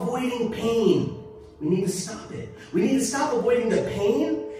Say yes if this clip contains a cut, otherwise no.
no